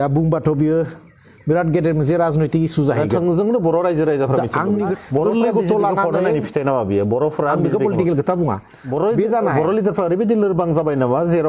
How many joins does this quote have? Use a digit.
2